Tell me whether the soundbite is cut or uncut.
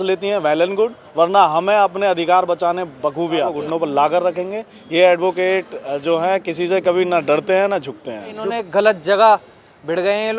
cut